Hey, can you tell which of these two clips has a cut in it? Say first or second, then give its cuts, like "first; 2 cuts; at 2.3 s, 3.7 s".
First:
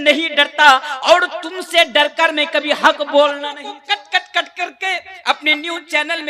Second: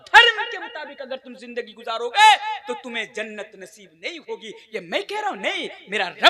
first; 1 cut; at 3.7 s